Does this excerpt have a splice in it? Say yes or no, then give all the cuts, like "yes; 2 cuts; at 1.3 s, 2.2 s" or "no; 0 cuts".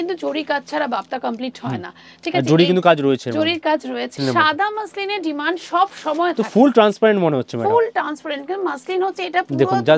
yes; 1 cut; at 4.1 s